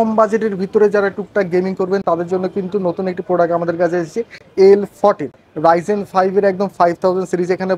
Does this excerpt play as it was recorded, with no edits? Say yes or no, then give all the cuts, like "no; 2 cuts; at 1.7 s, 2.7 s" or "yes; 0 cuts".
yes; 0 cuts